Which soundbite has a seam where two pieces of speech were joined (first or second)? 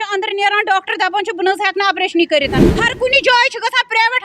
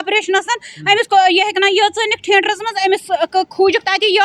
first